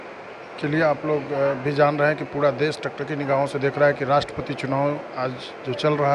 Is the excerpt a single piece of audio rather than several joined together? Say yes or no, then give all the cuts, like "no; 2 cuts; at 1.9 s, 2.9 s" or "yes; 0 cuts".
yes; 0 cuts